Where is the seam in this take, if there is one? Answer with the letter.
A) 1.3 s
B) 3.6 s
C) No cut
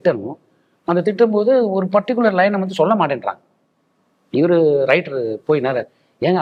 C